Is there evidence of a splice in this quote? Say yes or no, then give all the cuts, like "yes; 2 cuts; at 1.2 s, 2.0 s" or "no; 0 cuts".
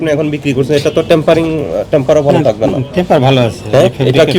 no; 0 cuts